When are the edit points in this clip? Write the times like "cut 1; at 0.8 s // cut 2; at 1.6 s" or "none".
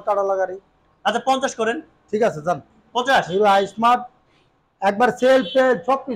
none